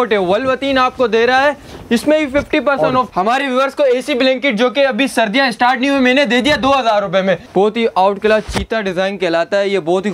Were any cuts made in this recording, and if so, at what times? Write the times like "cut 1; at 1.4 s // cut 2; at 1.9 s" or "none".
cut 1; at 3.1 s // cut 2; at 7.4 s